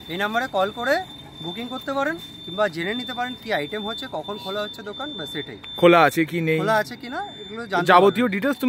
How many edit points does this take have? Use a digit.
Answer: 0